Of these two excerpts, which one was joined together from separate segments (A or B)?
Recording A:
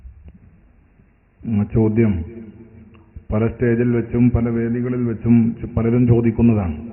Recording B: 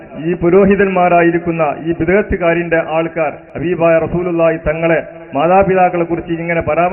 B